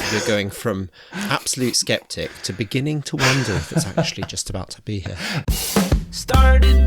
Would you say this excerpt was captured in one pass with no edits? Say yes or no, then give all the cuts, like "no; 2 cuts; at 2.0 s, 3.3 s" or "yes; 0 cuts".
no; 1 cut; at 5.4 s